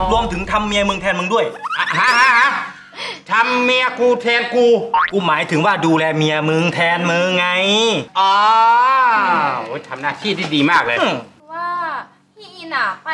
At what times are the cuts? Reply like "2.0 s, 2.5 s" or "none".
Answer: 11.3 s